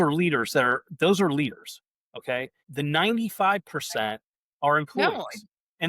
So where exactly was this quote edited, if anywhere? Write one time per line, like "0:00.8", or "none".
0:02.6